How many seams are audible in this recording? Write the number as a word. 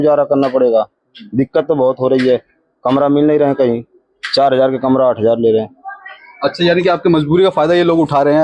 zero